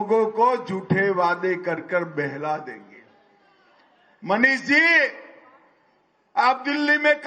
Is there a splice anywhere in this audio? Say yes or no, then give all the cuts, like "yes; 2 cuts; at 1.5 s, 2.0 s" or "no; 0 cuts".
yes; 1 cut; at 2.8 s